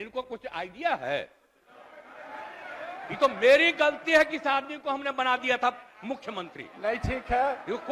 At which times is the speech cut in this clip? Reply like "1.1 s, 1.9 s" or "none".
none